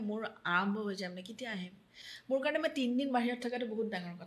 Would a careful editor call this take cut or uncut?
uncut